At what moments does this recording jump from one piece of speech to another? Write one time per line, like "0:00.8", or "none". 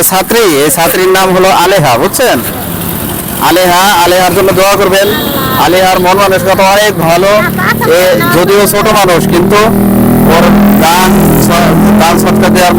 none